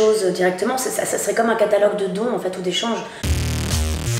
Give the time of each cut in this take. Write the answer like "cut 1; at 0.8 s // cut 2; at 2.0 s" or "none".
cut 1; at 3.2 s